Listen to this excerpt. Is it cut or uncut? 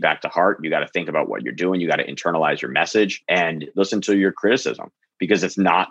cut